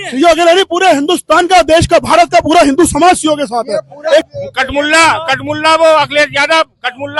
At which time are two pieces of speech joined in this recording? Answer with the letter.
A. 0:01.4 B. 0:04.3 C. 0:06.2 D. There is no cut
B